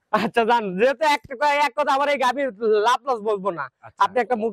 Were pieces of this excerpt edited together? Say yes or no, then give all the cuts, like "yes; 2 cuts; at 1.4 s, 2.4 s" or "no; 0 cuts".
no; 0 cuts